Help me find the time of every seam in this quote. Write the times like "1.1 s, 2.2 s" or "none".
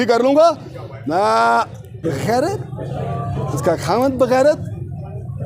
2.0 s